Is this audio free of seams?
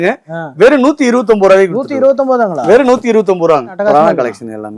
no; 1 cut; at 3.7 s

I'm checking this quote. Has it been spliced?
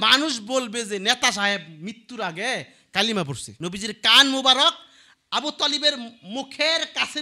yes; 1 cut; at 3.4 s

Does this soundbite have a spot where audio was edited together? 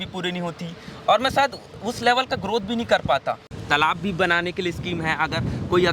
yes; 1 cut; at 3.5 s

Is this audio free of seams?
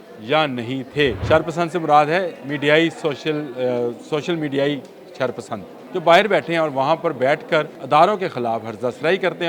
no; 3 cuts; at 1.2 s, 5.7 s, 7.8 s

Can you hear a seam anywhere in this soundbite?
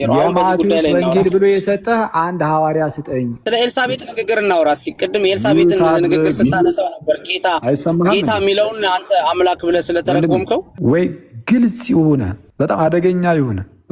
yes; 3 cuts; at 3.4 s, 10.7 s, 12.4 s

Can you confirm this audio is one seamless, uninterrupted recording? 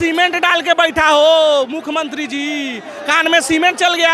yes; 0 cuts

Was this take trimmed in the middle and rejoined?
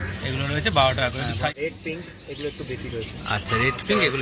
yes; 1 cut; at 1.5 s

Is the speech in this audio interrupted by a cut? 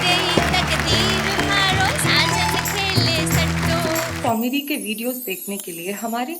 yes; 1 cut; at 4.1 s

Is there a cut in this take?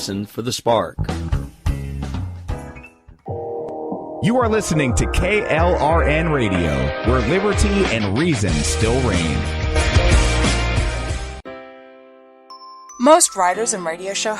yes; 1 cut; at 11.4 s

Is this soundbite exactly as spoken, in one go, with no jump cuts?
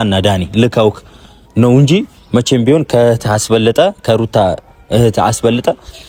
yes; 0 cuts

